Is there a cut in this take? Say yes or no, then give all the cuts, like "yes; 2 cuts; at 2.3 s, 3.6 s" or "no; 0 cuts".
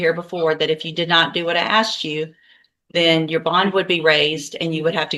no; 0 cuts